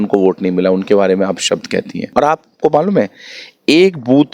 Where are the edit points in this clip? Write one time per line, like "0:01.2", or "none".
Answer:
0:02.1